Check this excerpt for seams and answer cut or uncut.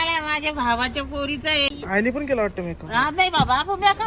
cut